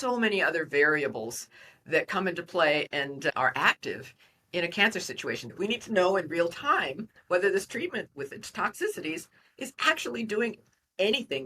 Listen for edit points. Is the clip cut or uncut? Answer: cut